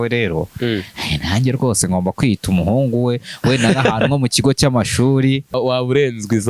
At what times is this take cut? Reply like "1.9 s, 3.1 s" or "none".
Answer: 5.5 s